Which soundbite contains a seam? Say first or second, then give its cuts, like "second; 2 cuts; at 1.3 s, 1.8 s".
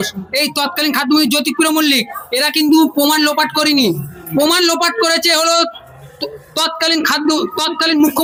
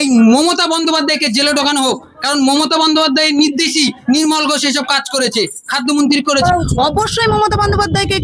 second; 1 cut; at 6.4 s